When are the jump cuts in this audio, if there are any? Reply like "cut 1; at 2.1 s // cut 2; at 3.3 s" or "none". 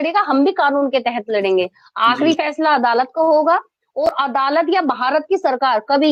none